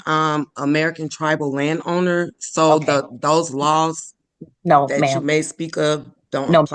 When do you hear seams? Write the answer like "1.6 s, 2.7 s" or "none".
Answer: none